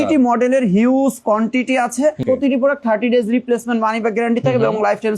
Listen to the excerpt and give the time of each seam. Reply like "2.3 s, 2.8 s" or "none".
2.2 s